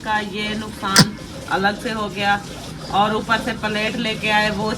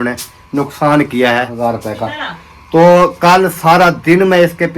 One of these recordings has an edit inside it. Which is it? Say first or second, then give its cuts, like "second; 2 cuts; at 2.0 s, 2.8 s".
second; 1 cut; at 1.5 s